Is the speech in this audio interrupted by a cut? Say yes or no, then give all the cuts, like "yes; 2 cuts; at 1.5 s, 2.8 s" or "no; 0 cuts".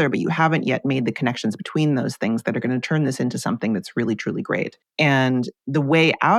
yes; 1 cut; at 4.8 s